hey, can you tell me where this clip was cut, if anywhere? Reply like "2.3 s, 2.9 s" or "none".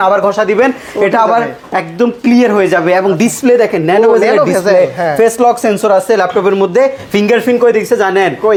none